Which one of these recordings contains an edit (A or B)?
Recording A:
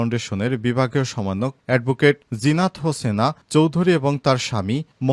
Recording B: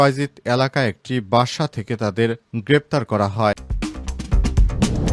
B